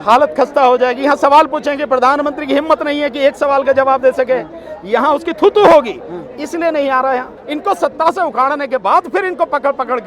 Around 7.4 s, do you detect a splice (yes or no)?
yes